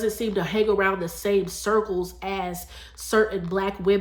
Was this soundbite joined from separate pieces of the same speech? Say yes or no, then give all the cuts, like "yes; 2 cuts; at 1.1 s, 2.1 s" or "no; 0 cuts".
no; 0 cuts